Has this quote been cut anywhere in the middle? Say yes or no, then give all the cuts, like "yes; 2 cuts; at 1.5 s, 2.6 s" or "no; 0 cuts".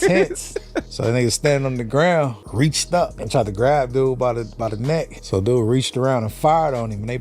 yes; 3 cuts; at 0.9 s, 3.0 s, 5.2 s